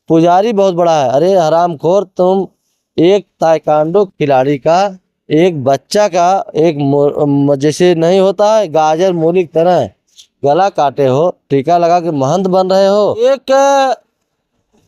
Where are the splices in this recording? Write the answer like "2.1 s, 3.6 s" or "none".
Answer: 13.2 s